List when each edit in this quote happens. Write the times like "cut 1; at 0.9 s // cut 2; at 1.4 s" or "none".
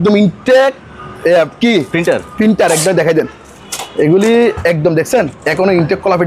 none